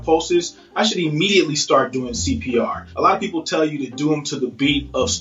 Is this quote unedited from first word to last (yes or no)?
no